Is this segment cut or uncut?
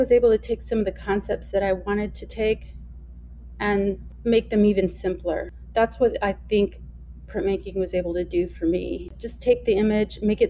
cut